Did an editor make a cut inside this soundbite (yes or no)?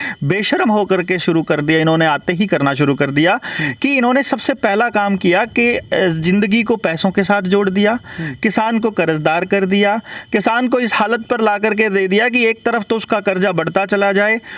no